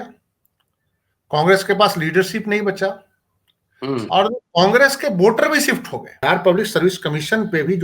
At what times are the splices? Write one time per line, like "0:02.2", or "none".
0:06.2